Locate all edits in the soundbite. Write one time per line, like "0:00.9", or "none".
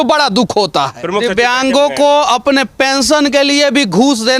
0:01.0